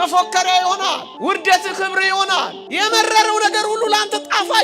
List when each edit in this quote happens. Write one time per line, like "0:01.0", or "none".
0:01.1
0:02.6